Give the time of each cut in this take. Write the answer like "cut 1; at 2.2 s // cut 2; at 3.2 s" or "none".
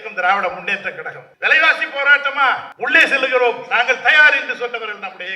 cut 1; at 1.2 s // cut 2; at 2.7 s